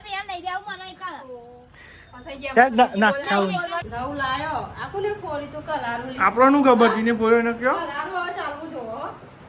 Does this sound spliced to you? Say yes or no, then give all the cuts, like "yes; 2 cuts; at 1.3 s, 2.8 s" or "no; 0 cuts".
yes; 1 cut; at 3.8 s